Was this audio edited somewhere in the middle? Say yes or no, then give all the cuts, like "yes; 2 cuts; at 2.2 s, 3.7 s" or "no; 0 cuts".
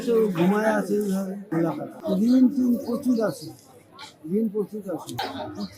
yes; 1 cut; at 1.8 s